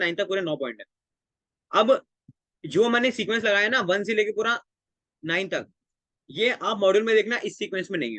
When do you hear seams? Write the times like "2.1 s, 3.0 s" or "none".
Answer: none